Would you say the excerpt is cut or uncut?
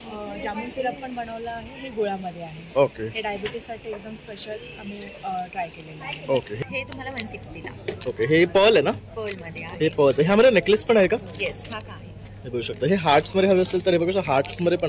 cut